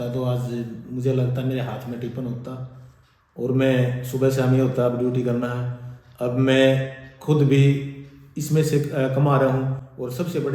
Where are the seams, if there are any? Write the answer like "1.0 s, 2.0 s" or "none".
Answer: none

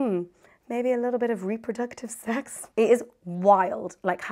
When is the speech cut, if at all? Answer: none

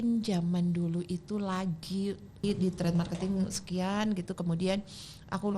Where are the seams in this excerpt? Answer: 2.4 s

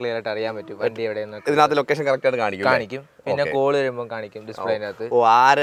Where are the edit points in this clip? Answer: none

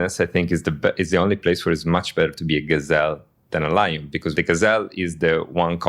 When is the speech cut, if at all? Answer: 4.3 s

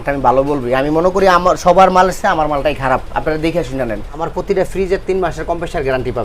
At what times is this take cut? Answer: 4.2 s

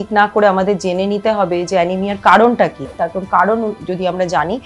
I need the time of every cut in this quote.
3.0 s

